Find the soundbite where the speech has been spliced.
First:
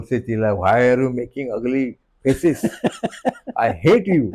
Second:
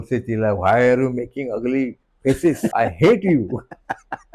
second; 1 cut; at 2.7 s

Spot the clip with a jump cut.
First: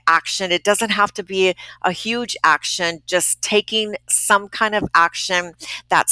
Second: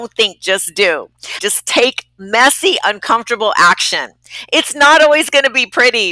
second; 1 cut; at 1.3 s

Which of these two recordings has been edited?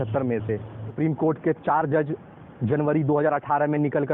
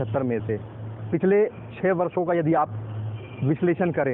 first; 1 cut; at 1.0 s

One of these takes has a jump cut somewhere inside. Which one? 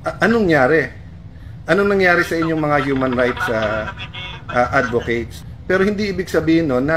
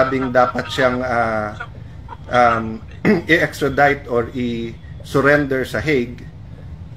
first; 1 cut; at 5.4 s

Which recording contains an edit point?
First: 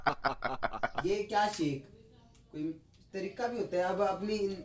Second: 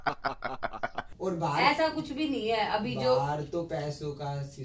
second; 1 cut; at 0.9 s

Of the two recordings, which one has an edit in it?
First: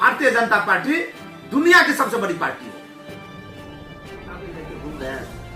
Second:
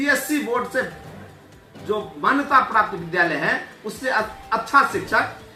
first; 2 cuts; at 2.8 s, 4.0 s

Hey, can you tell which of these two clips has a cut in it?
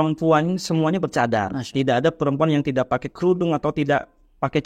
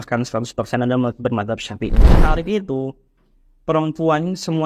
second; 1 cut; at 2.2 s

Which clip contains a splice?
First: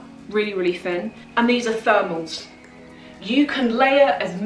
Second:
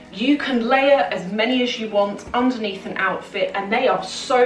first; 1 cut; at 1.2 s

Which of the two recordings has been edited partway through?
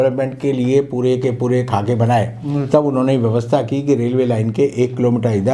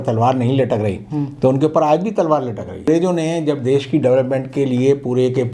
second; 1 cut; at 2.8 s

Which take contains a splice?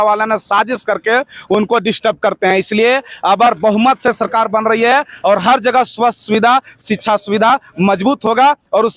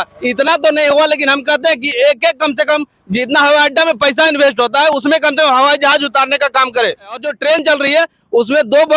second; 1 cut; at 7.3 s

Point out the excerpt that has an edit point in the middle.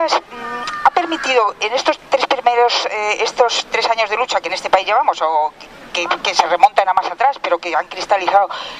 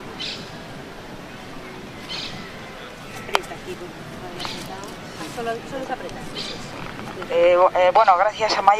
first; 1 cut; at 4.0 s

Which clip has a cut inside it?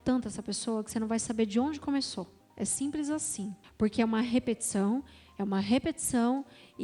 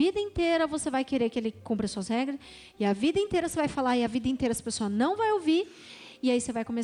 first; 2 cuts; at 2.4 s, 3.6 s

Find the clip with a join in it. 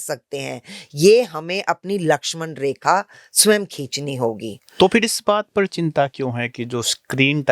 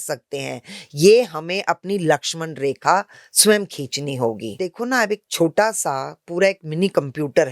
second; 1 cut; at 4.7 s

